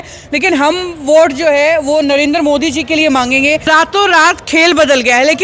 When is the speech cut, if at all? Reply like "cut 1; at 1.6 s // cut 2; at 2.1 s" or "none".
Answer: cut 1; at 3.7 s